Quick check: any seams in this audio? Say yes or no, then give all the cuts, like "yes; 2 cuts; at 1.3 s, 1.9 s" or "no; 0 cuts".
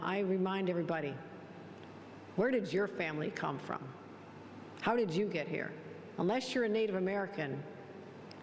no; 0 cuts